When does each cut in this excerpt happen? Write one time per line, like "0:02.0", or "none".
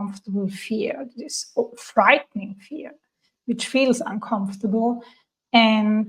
none